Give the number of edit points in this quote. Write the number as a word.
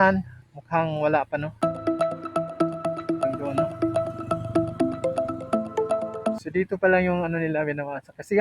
two